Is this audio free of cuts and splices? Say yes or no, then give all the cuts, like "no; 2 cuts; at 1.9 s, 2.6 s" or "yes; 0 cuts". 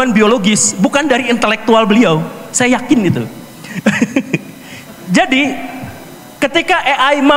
yes; 0 cuts